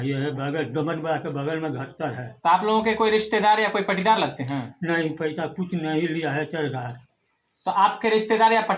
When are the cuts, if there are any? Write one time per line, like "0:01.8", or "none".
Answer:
none